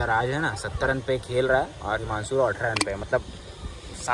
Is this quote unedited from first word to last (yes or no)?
yes